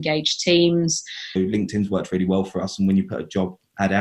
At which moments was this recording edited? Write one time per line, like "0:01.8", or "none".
0:01.3

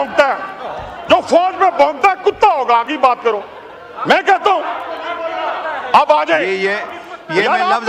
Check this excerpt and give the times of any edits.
none

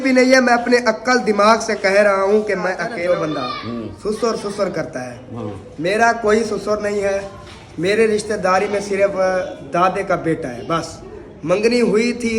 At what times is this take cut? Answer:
0:02.9

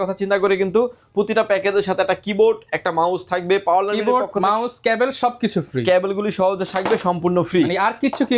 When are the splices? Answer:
none

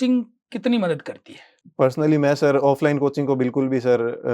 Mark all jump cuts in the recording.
none

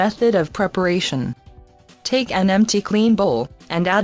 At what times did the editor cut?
0:02.1

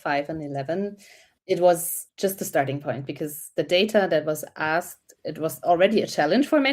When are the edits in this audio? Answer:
0:02.0
0:05.1

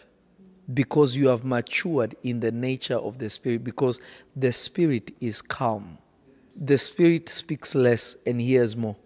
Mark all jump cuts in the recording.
0:06.5

